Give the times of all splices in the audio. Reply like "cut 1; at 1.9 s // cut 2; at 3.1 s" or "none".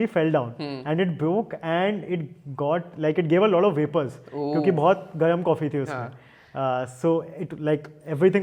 none